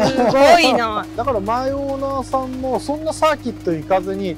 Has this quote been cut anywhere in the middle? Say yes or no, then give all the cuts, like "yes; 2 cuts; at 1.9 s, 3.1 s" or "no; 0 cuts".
yes; 1 cut; at 1.1 s